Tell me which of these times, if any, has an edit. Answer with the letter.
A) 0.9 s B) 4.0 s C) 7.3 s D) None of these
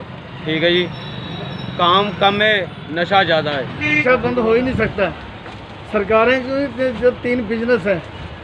B